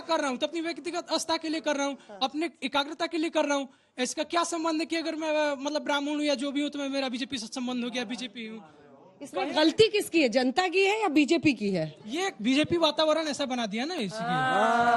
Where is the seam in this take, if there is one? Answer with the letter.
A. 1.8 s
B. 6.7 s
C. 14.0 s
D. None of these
C